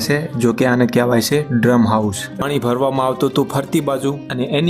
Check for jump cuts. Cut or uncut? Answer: cut